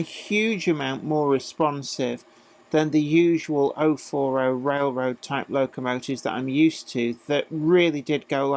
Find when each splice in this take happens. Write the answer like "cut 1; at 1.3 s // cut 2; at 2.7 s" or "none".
none